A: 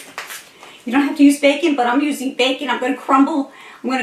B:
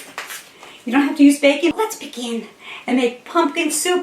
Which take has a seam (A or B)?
B